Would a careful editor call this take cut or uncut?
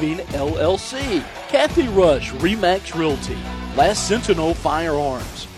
cut